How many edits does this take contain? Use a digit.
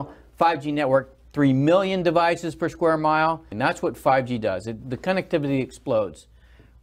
1